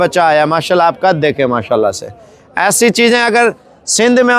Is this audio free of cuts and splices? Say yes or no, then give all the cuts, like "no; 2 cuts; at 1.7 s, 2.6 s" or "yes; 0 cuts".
yes; 0 cuts